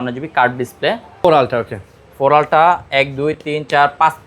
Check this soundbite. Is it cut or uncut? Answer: cut